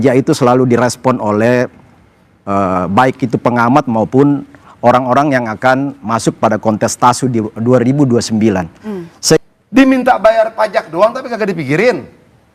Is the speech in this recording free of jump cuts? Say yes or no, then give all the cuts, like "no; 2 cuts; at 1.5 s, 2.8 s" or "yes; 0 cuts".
no; 1 cut; at 9.4 s